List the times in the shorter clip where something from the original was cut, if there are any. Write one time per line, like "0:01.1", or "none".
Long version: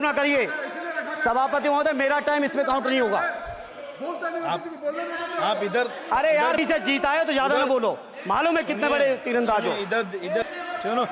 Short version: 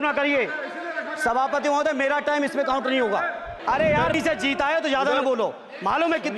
0:03.5